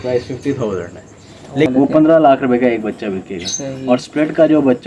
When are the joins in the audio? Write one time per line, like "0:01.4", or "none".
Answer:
0:01.7

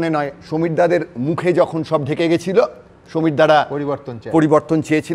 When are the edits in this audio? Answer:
none

